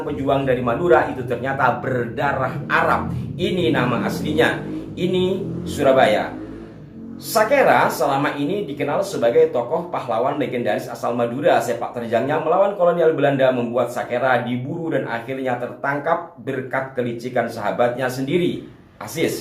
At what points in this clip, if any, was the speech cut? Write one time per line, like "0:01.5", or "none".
none